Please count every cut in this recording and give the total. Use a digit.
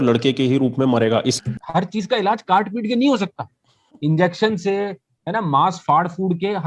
1